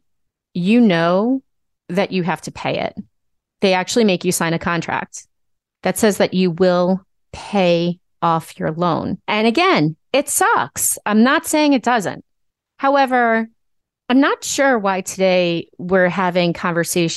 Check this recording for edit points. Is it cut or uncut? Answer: cut